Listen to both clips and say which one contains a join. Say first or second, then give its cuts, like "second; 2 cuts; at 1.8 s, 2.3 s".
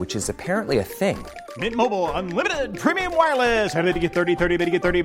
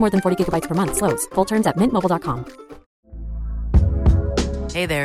second; 1 cut; at 2.9 s